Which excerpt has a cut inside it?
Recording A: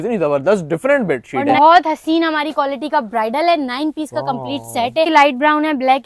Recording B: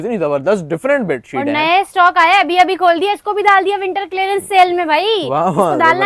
A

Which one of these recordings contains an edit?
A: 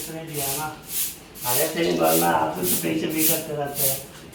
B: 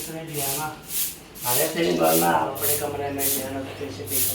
B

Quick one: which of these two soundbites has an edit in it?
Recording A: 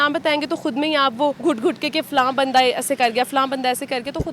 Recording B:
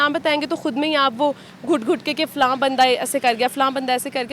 A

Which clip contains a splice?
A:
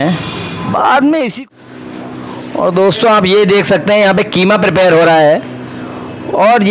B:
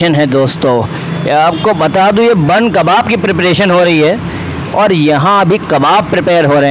A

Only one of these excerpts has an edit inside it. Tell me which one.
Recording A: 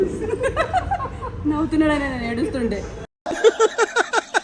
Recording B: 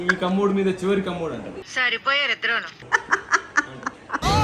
B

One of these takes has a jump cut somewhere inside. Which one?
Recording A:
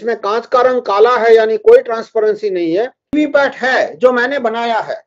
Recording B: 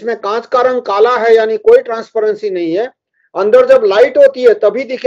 A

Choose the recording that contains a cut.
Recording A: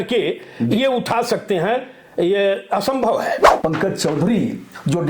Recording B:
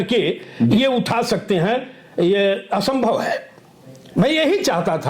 A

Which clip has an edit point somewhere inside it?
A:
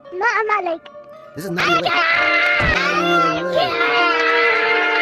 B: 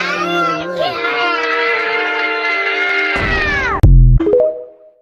B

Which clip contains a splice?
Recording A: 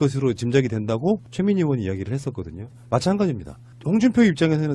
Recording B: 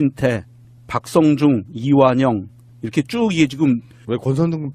A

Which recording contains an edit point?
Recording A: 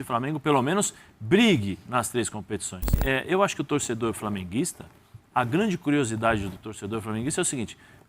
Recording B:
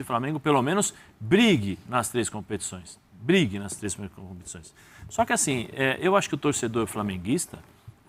A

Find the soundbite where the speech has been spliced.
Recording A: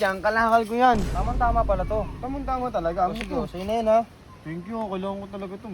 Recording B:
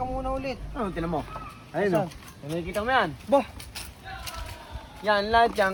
A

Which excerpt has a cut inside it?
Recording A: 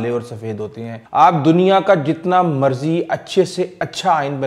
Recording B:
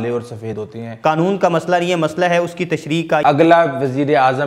B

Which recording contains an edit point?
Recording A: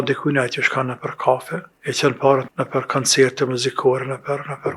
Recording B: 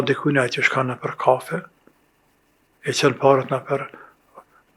A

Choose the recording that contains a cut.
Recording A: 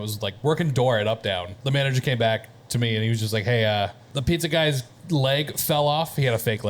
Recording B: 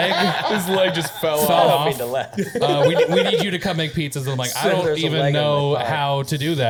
A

